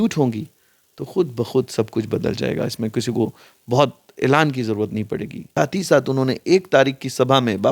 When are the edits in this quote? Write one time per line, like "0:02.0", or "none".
0:05.4